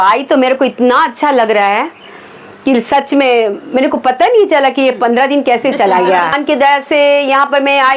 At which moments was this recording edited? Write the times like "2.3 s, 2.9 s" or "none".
6.3 s